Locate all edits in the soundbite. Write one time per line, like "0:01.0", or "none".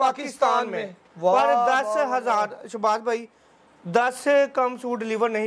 none